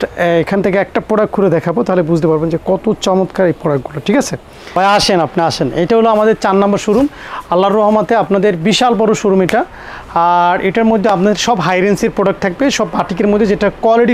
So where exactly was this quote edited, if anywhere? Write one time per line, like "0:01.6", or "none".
0:04.6